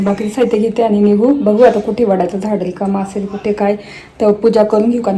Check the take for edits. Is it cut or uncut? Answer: uncut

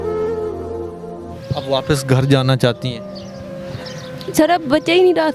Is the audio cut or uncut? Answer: cut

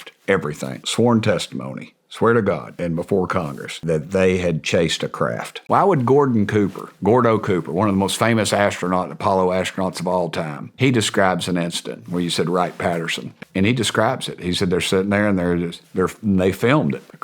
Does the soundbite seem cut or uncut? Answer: cut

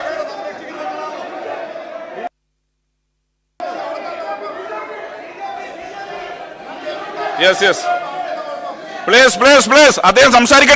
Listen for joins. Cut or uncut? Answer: uncut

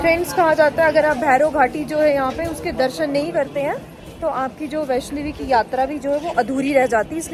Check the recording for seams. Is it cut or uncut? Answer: uncut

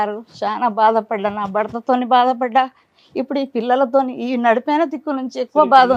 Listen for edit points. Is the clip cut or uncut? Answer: uncut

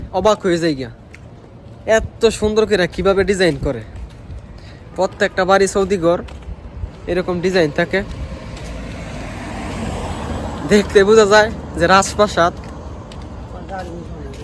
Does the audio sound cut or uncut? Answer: uncut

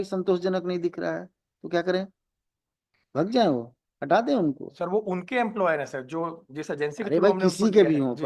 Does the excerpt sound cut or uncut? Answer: uncut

